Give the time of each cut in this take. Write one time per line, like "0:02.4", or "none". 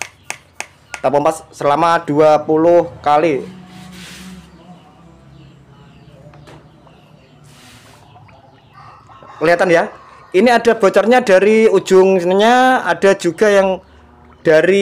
none